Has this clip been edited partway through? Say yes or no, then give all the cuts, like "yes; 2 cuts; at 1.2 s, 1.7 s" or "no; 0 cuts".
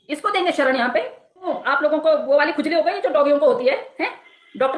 yes; 1 cut; at 1.5 s